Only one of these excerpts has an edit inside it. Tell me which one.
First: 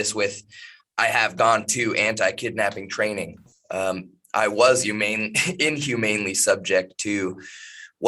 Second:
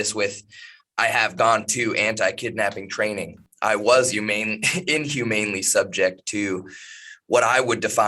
second; 1 cut; at 3.4 s

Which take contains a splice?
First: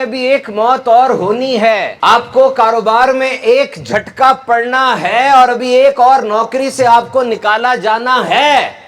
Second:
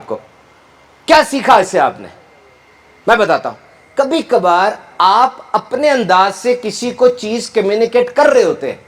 first; 1 cut; at 1.9 s

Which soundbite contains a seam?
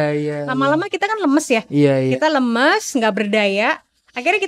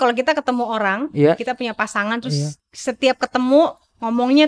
second; 1 cut; at 2.6 s

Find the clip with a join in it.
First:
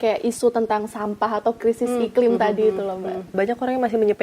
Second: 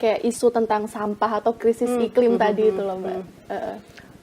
first; 1 cut; at 3.3 s

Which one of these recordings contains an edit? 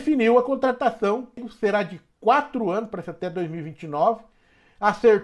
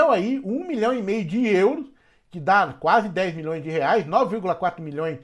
first; 1 cut; at 1.4 s

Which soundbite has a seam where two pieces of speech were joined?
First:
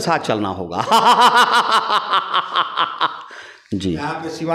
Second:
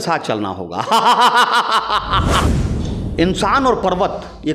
second; 1 cut; at 2.5 s

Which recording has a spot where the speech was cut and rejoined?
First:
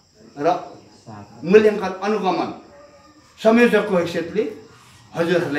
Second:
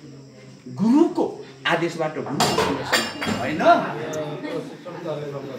second; 1 cut; at 3.3 s

